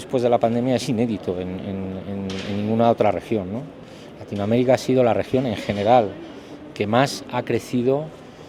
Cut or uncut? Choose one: uncut